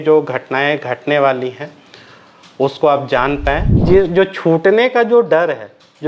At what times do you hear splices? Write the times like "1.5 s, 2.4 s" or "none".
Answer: 3.7 s